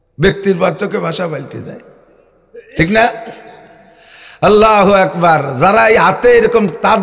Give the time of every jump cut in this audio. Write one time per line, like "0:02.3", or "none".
none